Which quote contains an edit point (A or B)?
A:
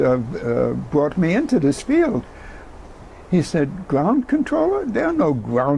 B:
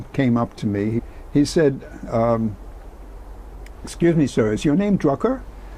B